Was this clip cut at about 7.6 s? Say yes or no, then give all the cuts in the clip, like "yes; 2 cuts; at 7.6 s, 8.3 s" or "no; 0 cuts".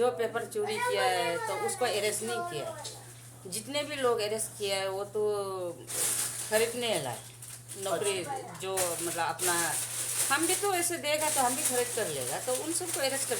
no; 0 cuts